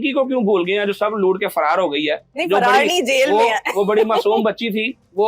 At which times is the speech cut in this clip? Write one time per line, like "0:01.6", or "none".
none